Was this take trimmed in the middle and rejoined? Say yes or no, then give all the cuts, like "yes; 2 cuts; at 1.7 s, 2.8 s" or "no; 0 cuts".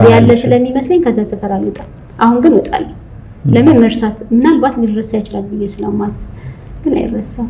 no; 0 cuts